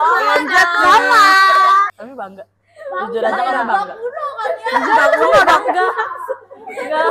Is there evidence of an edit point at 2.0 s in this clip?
yes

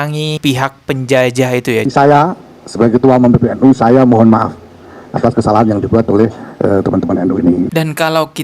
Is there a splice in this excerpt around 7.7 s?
yes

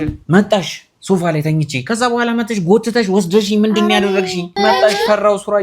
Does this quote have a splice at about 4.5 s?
yes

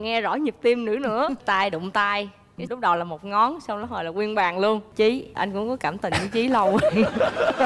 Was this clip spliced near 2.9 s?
no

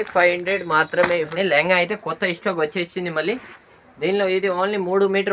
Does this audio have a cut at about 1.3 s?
yes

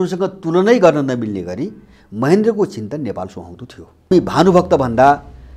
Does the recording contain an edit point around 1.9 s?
no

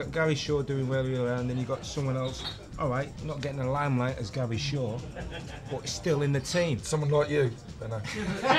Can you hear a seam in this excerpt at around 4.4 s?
no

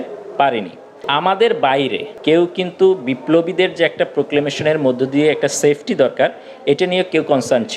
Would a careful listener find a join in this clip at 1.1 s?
yes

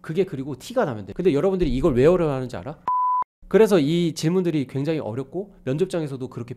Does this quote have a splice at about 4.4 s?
no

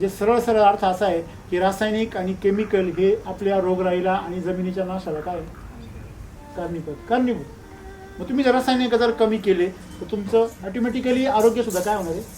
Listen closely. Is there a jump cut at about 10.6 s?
yes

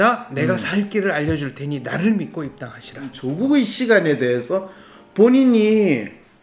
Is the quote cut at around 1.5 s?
no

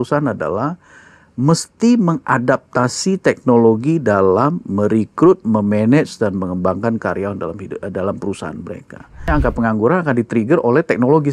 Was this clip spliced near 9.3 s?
yes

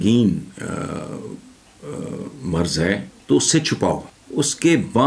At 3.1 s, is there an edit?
yes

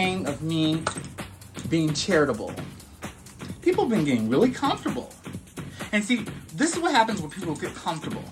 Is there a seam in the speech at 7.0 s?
no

